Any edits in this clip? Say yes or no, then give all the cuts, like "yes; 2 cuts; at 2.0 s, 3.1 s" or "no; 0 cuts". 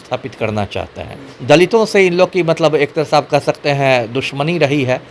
yes; 1 cut; at 1.3 s